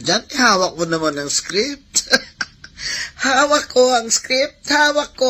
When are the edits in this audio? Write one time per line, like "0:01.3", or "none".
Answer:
none